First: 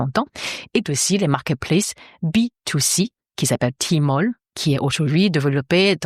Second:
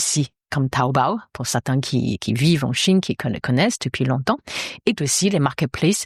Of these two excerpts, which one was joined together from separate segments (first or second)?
first